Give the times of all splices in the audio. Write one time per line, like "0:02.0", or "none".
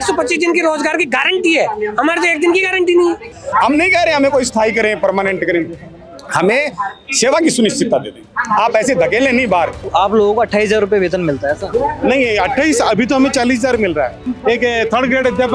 0:03.3
0:09.8
0:14.3